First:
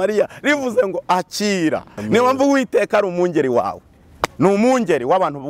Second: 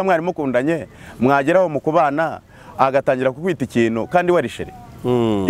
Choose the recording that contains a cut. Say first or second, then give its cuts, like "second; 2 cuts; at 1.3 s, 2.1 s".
first; 1 cut; at 1.9 s